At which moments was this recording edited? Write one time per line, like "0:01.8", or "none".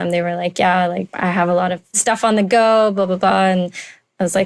0:01.1
0:02.0